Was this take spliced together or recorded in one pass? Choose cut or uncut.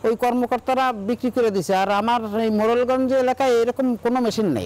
uncut